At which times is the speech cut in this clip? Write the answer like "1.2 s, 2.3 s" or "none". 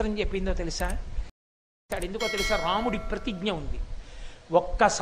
1.8 s